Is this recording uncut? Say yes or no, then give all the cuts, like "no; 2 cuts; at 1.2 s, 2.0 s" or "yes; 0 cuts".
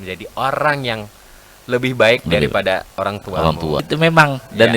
no; 1 cut; at 3.9 s